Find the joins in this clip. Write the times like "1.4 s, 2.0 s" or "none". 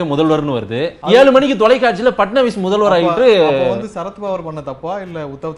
0.9 s